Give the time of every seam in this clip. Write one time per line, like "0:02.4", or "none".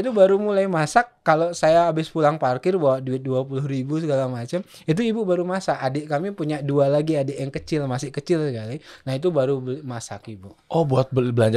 none